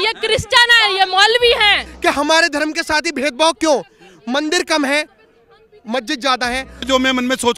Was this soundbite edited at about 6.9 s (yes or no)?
yes